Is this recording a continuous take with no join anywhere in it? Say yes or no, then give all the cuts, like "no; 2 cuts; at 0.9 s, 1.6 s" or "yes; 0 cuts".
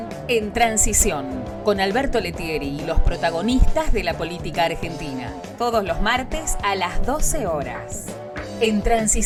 yes; 0 cuts